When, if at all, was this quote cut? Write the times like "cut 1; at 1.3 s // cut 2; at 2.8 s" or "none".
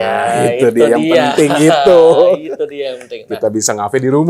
none